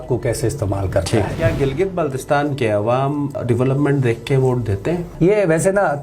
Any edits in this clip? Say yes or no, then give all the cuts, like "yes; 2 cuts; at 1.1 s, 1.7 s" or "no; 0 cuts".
yes; 3 cuts; at 1.3 s, 3.4 s, 5.1 s